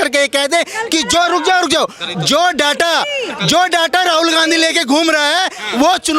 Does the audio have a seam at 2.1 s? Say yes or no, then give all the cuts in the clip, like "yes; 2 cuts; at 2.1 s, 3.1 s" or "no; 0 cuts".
no; 0 cuts